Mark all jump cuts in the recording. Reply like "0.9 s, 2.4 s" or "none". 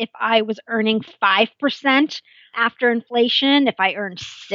2.6 s